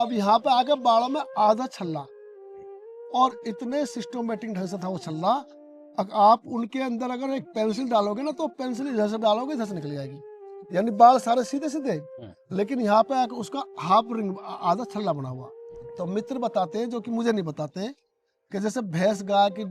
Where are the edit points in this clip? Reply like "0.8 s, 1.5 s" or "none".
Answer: 16.1 s